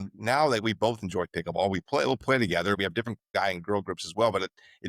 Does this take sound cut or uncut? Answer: cut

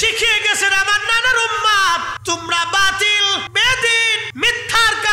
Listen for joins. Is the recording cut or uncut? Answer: cut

